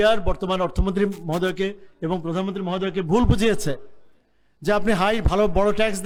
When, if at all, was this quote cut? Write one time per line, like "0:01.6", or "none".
none